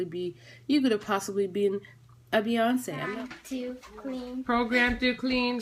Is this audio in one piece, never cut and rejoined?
no; 1 cut; at 2.9 s

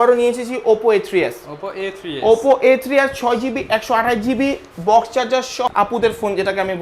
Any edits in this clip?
yes; 1 cut; at 5.7 s

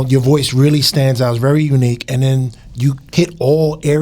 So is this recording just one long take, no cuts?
no; 1 cut; at 3.0 s

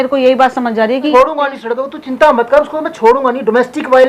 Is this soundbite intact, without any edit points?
no; 1 cut; at 1.1 s

